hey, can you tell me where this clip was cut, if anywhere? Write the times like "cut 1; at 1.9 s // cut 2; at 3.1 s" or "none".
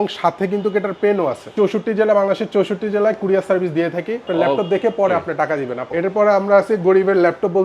cut 1; at 1.5 s // cut 2; at 4.2 s // cut 3; at 5.9 s